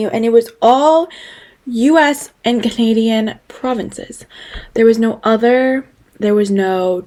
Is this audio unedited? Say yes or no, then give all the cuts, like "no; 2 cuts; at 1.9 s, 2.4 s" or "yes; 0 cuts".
yes; 0 cuts